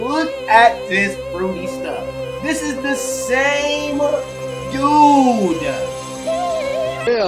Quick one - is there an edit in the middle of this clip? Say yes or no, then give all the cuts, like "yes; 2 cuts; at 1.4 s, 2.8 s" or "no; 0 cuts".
no; 0 cuts